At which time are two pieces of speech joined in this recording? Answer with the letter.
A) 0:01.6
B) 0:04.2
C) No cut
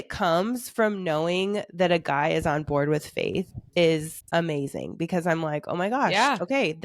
B